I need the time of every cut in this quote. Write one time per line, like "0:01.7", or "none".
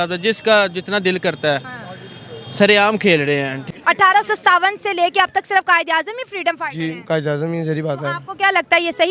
0:03.6